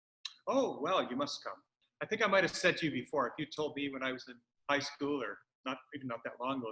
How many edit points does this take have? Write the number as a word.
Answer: one